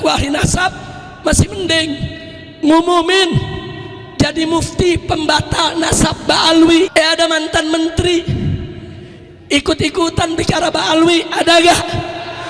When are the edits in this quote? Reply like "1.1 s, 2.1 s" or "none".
6.9 s